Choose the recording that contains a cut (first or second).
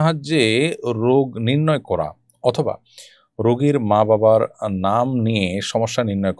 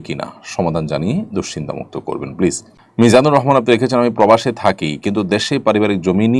second